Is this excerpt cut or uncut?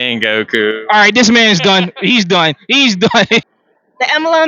cut